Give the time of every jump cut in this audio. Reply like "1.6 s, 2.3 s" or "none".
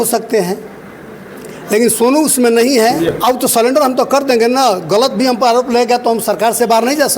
3.1 s